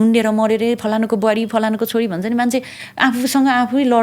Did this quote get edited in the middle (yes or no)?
no